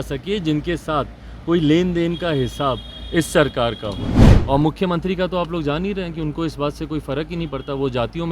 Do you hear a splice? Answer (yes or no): yes